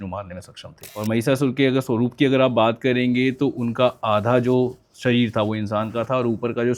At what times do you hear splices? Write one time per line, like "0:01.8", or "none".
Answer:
0:01.0